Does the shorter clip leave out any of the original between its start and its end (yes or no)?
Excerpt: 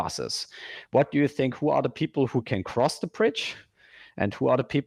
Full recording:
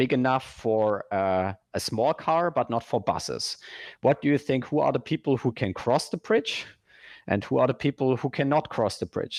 no